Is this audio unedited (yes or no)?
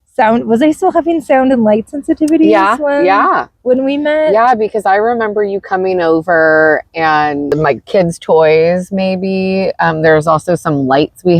no